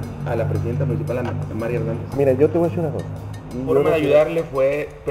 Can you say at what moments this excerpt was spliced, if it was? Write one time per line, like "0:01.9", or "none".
0:03.9